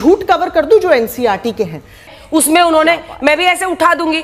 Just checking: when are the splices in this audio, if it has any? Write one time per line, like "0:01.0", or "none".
0:02.2